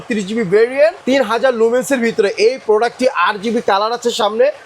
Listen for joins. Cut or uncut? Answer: cut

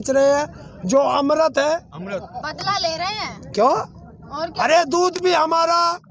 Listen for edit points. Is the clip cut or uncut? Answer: uncut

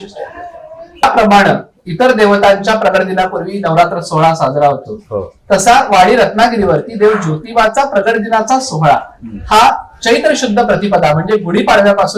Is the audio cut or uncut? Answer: cut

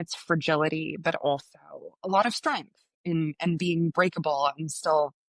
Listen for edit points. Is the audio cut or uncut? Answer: uncut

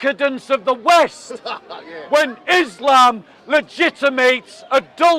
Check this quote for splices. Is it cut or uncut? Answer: uncut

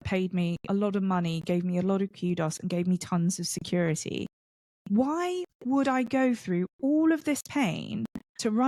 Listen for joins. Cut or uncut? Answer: uncut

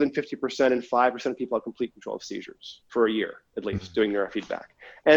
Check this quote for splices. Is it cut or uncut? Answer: uncut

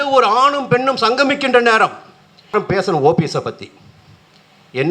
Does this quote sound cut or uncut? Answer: cut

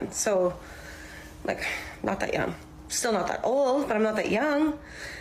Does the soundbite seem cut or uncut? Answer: uncut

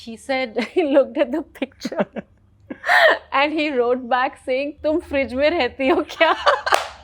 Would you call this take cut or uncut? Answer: uncut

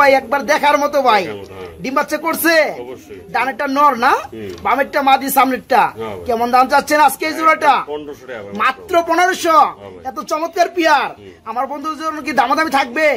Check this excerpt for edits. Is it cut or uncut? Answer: uncut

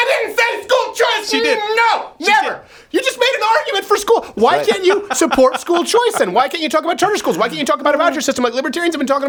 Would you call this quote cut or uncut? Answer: uncut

